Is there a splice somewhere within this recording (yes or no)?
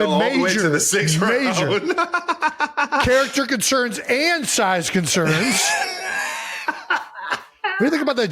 no